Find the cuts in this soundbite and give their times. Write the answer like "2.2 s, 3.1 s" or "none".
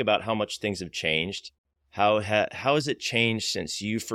none